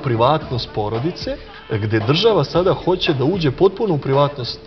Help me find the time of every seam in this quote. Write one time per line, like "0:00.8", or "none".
0:01.5